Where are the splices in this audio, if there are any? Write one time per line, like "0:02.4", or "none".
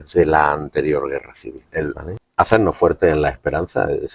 0:01.6

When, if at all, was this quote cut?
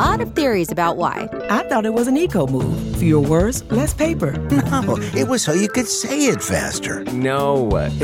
none

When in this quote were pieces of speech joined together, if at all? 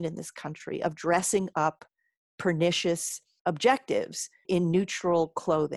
0:03.3
0:04.4

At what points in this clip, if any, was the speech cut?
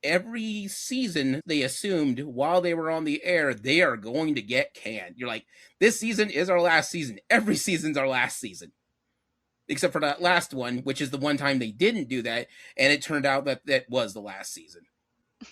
0:01.4

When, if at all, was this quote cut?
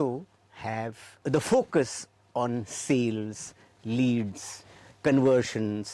0:01.2

